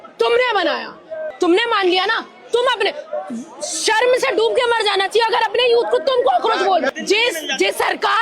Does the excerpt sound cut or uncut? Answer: cut